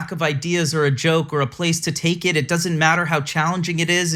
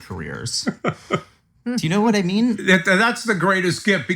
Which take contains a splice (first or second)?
second